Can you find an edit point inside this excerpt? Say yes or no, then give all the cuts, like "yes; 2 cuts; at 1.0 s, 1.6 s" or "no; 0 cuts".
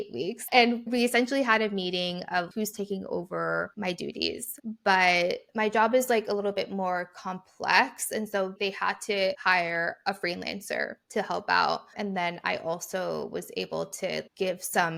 no; 0 cuts